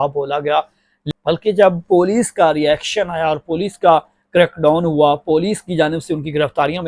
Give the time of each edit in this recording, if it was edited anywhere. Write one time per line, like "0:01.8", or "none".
0:01.0